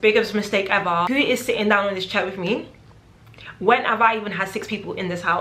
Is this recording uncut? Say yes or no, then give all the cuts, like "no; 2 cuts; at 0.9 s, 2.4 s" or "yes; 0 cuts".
no; 1 cut; at 1.1 s